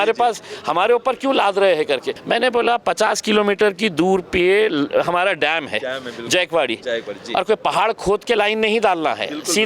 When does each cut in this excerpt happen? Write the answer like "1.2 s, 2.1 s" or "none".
2.1 s